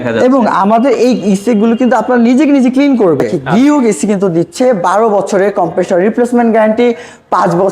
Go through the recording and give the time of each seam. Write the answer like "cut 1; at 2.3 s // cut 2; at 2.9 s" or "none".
cut 1; at 3.4 s